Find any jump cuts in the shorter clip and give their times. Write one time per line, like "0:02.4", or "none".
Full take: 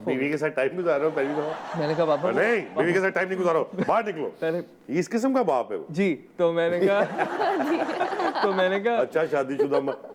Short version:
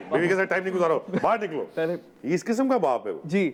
none